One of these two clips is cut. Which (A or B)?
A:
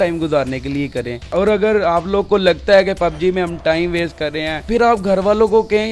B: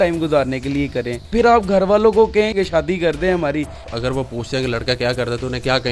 B